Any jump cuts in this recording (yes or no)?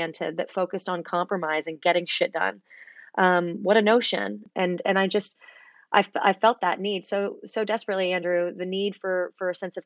yes